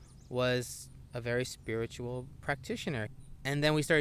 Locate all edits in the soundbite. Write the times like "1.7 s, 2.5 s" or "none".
3.1 s